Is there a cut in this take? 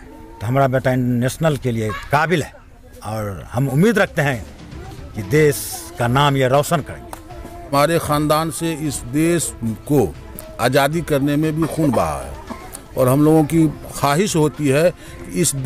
yes; 1 cut; at 7.7 s

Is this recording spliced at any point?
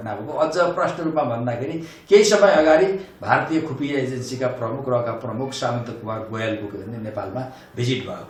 no; 0 cuts

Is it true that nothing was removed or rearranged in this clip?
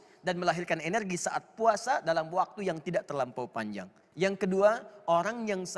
no; 1 cut; at 4.0 s

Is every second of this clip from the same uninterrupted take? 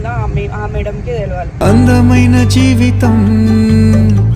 yes; 0 cuts

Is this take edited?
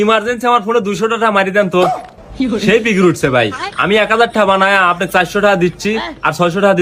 no; 0 cuts

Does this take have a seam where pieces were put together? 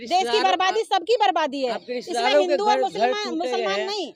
no; 0 cuts

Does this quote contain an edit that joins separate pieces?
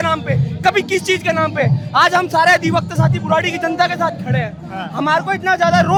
no; 0 cuts

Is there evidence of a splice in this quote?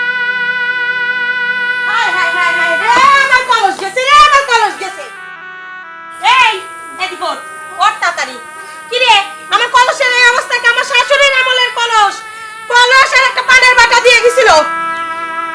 no; 0 cuts

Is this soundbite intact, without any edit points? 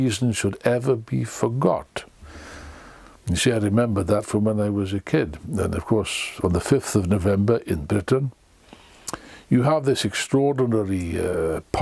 yes; 0 cuts

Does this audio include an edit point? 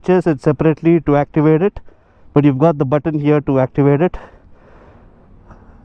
no; 0 cuts

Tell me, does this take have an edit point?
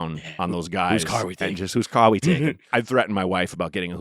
yes; 1 cut; at 2.7 s

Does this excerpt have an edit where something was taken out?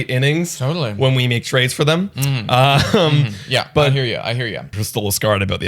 yes; 1 cut; at 4.7 s

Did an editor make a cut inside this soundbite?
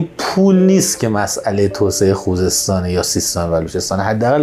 no; 0 cuts

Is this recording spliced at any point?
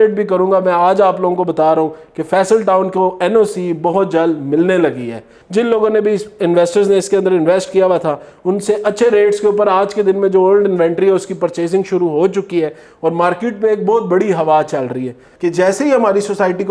yes; 2 cuts; at 5.3 s, 15.3 s

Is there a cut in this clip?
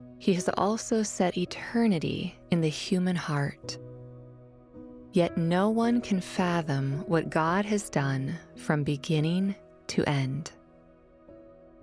yes; 1 cut; at 10.7 s

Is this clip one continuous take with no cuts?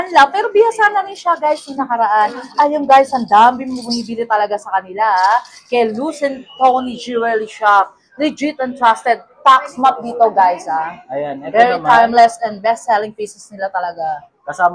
yes; 0 cuts

